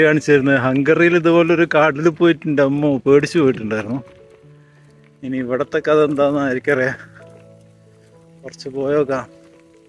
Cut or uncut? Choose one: uncut